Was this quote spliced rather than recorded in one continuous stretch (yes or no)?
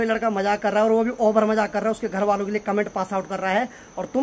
no